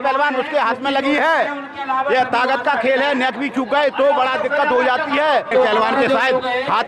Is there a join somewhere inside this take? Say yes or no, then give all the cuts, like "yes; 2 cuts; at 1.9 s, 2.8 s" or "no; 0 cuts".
yes; 1 cut; at 5.5 s